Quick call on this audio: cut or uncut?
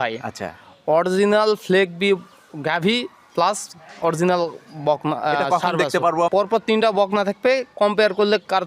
cut